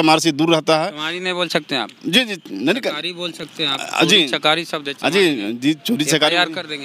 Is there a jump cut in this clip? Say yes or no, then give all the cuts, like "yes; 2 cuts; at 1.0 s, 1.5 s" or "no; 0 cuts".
no; 0 cuts